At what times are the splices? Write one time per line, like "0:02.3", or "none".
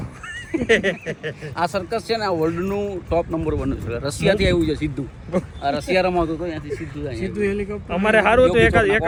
none